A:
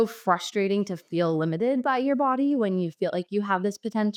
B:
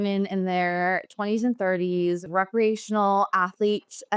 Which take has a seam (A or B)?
B